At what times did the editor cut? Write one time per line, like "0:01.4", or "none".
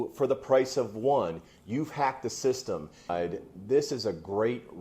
0:03.1